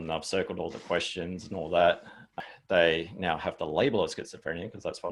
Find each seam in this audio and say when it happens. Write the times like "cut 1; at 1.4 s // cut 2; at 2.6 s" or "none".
cut 1; at 2.3 s